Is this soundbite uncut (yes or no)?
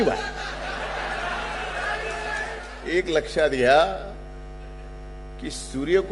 no